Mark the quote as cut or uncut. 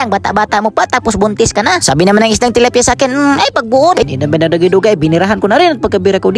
cut